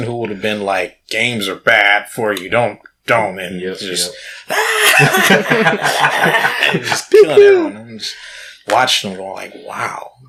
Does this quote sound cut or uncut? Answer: uncut